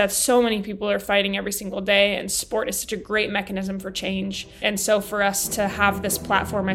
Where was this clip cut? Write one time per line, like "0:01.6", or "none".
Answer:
0:04.5

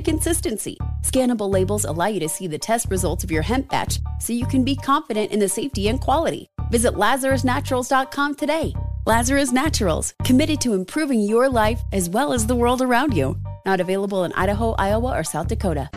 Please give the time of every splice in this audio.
none

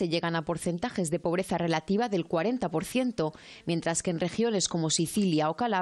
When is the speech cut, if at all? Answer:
none

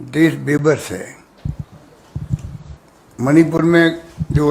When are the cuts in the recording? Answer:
0:01.2

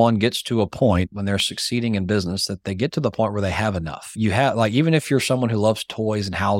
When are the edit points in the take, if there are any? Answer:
none

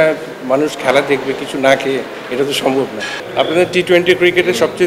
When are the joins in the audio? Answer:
0:03.2

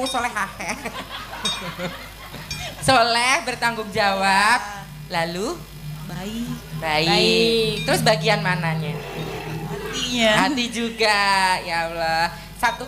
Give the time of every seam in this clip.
none

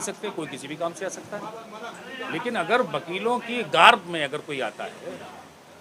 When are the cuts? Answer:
none

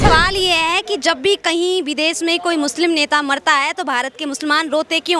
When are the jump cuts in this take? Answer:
none

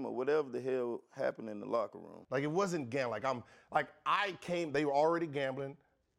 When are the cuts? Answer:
0:02.1

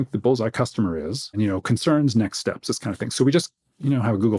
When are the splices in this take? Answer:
0:01.4

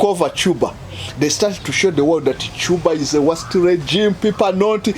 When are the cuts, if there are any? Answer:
none

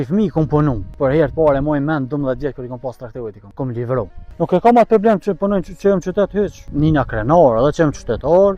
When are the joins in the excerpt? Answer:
0:01.0
0:03.4
0:04.2
0:06.6

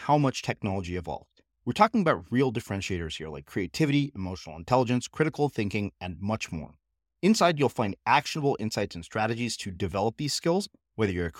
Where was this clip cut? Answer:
none

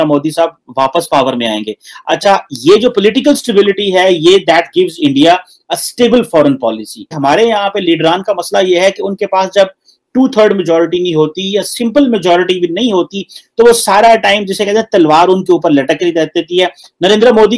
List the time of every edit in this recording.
none

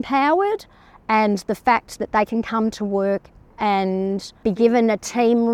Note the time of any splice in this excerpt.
none

